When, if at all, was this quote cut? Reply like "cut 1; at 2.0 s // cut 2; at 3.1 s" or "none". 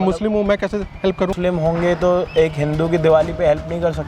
cut 1; at 1.4 s